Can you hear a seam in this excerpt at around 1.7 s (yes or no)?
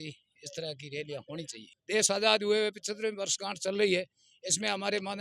yes